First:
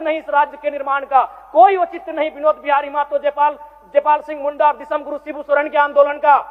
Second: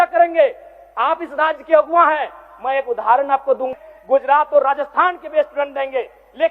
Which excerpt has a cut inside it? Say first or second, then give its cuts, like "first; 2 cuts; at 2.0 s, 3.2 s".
second; 1 cut; at 3.7 s